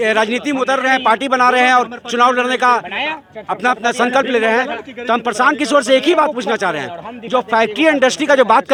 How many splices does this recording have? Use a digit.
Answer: 0